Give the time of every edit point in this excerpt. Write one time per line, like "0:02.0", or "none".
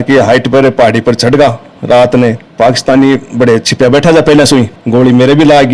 0:02.4
0:04.7